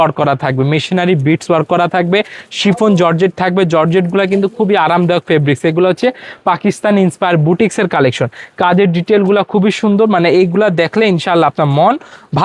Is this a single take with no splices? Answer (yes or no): yes